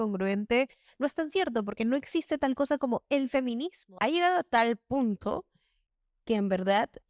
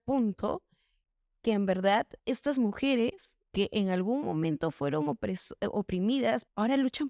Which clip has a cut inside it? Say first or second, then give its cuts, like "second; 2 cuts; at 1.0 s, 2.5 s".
first; 1 cut; at 3.8 s